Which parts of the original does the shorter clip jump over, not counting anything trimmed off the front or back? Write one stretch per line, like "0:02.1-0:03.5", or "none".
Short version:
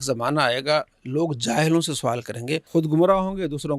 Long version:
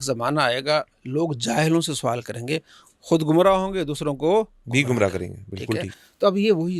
0:02.6-0:03.0